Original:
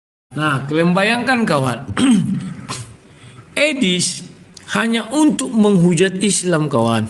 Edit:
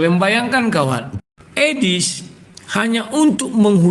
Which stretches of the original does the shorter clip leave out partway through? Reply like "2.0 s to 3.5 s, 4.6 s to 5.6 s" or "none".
1.8 s to 3.1 s